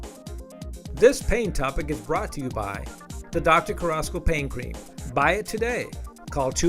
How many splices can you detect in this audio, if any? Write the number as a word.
one